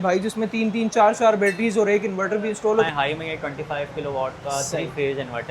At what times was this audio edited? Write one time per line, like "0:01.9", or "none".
0:02.9